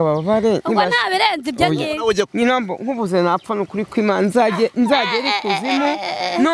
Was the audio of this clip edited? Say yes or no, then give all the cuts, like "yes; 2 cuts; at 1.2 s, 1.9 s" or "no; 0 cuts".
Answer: yes; 1 cut; at 2.3 s